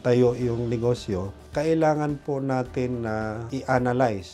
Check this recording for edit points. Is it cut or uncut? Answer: cut